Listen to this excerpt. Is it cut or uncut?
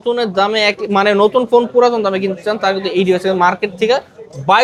uncut